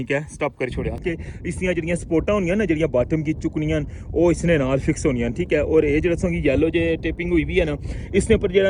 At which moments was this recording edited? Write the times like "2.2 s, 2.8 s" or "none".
1.0 s